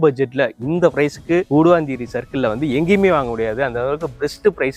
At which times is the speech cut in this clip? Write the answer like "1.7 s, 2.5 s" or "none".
none